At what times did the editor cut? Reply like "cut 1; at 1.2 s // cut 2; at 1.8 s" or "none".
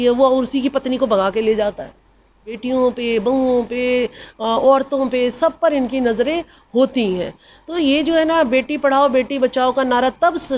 cut 1; at 2.6 s